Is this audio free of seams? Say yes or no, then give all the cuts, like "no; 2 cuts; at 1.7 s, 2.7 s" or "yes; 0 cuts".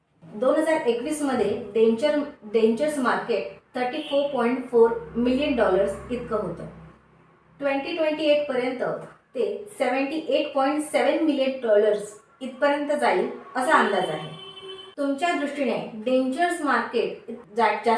yes; 0 cuts